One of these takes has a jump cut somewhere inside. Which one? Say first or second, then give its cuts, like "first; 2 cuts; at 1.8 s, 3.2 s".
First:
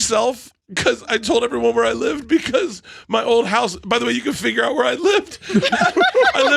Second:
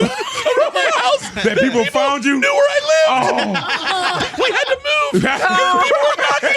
second; 1 cut; at 4.3 s